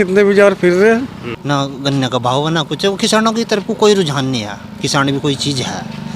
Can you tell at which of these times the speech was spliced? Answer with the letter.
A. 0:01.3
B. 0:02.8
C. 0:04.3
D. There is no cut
A